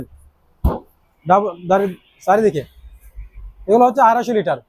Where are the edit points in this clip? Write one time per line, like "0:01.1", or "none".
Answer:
none